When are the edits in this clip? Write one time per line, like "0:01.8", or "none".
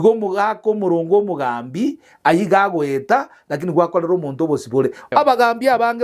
0:05.1

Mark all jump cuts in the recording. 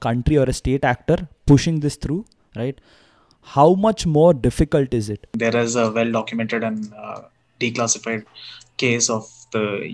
0:05.3

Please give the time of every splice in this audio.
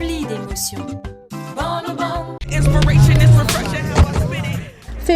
0:02.4

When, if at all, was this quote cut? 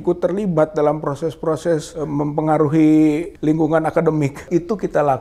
0:01.9
0:03.3
0:04.4

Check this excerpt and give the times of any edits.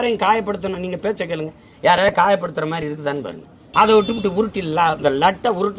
0:03.6

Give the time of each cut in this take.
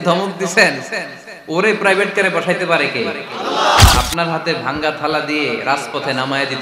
0:03.9

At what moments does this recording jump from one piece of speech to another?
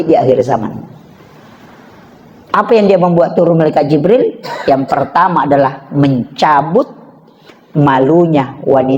none

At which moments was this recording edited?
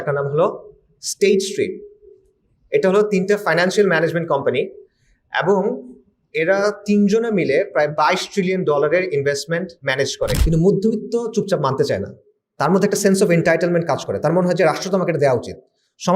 0:10.4

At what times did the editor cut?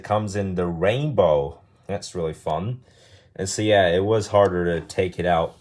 none

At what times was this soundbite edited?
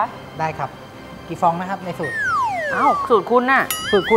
none

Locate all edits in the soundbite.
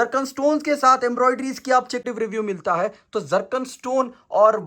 0:02.0

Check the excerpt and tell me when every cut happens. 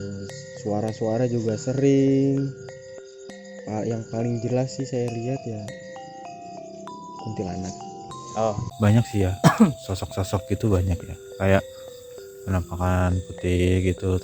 0:08.7

